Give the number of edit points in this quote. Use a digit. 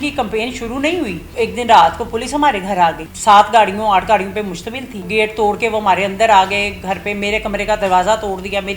3